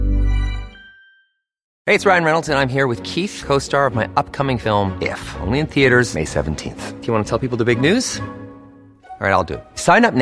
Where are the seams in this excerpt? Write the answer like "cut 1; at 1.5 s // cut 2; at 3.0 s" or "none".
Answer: cut 1; at 1.7 s